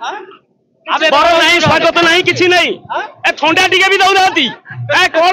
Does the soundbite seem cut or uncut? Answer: uncut